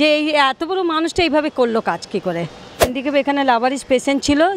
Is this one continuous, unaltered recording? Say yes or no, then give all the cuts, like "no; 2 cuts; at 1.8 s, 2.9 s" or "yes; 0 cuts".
no; 1 cut; at 2.9 s